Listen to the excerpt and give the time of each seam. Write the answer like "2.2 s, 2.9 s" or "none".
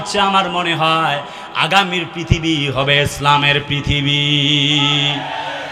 none